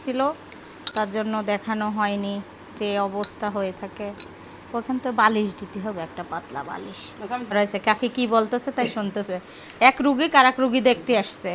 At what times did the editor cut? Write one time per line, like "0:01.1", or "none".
0:07.5